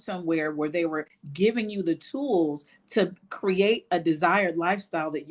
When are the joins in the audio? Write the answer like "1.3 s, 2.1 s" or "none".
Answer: none